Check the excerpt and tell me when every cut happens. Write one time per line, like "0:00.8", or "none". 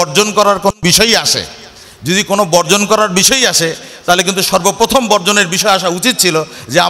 none